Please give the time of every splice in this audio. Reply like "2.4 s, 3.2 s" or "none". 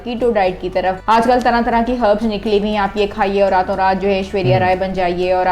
1.0 s